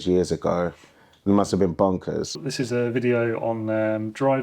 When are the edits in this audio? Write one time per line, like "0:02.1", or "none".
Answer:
0:02.4